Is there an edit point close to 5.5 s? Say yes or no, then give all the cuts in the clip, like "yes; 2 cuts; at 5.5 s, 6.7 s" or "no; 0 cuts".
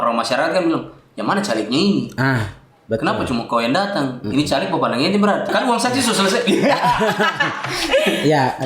yes; 1 cut; at 5.5 s